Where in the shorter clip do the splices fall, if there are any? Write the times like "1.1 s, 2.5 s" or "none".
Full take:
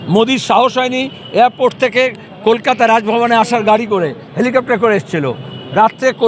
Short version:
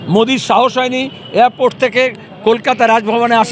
none